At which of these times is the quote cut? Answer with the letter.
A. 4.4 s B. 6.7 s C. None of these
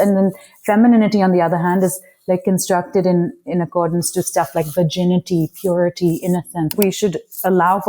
B